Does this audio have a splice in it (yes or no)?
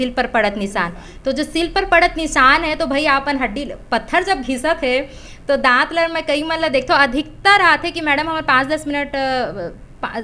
no